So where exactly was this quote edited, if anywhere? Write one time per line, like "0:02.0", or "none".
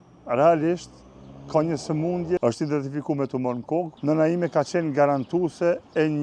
0:02.4
0:03.9